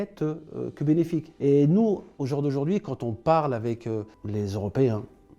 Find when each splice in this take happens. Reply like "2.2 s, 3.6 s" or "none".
1.3 s, 2.1 s, 4.2 s